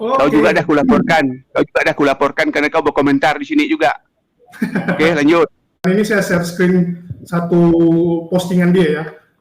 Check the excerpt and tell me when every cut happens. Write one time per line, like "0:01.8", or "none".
0:05.8

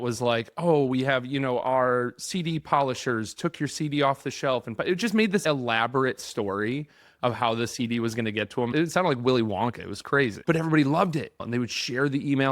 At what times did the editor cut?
0:08.7
0:10.4
0:11.4

